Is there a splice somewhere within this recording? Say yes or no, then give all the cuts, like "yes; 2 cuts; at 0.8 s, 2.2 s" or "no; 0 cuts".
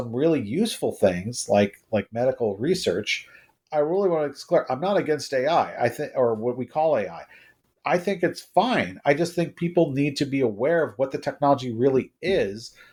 no; 0 cuts